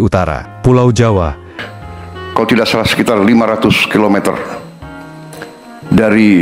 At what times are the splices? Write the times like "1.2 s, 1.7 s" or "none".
1.5 s